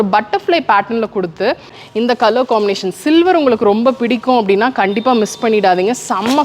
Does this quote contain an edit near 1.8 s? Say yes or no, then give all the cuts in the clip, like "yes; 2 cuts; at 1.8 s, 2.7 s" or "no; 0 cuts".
yes; 1 cut; at 1.8 s